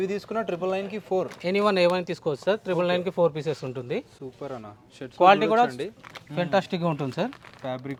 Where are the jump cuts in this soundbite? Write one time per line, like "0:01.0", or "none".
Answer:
none